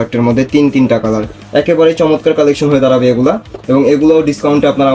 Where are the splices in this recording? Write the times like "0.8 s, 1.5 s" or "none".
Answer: none